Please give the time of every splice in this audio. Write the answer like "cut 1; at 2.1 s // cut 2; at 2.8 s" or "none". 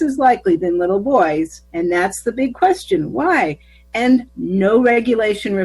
cut 1; at 1.6 s // cut 2; at 4.3 s